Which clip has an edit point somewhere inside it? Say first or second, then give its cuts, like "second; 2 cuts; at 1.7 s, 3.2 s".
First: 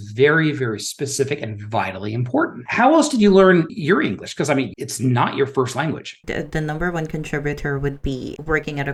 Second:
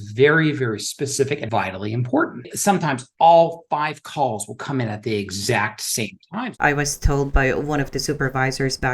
second; 3 cuts; at 1.4 s, 2.5 s, 6.3 s